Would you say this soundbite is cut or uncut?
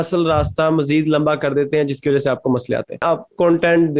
cut